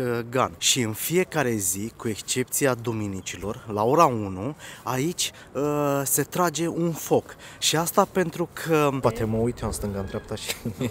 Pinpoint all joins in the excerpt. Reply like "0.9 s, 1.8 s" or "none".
9.0 s